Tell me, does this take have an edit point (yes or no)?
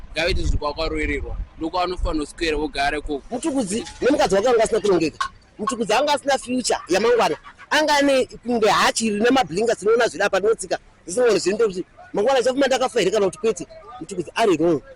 yes